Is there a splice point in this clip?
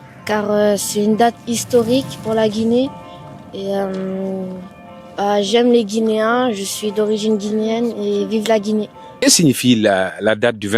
yes; 1 cut; at 9.1 s

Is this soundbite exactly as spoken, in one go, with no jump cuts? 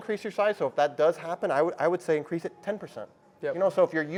yes; 0 cuts

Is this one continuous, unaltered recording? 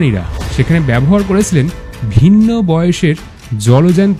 yes; 0 cuts

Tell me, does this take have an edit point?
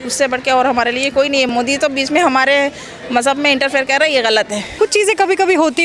yes; 2 cuts; at 1.5 s, 4.6 s

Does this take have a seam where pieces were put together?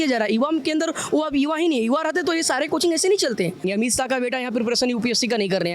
yes; 1 cut; at 3.6 s

